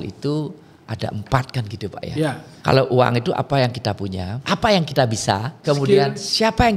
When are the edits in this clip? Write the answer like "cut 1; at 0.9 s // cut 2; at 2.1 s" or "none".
cut 1; at 2.5 s // cut 2; at 4.3 s // cut 3; at 5.6 s

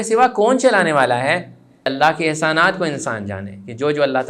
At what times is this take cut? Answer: cut 1; at 1.9 s

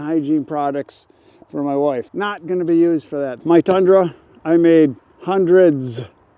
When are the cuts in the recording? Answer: cut 1; at 2.1 s // cut 2; at 3.3 s

